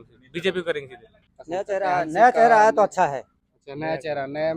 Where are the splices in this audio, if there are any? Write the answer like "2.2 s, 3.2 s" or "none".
1.3 s